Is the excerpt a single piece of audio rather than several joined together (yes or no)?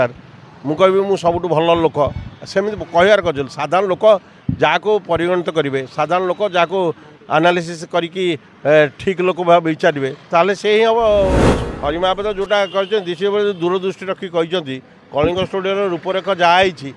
no